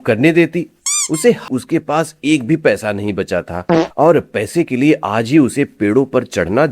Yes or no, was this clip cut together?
yes